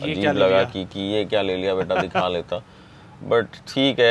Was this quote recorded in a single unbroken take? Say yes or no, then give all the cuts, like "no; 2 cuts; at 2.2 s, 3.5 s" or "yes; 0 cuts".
yes; 0 cuts